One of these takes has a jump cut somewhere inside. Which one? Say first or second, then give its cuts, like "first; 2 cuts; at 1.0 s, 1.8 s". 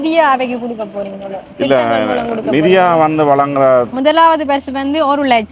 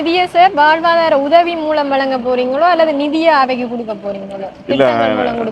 first; 1 cut; at 3.9 s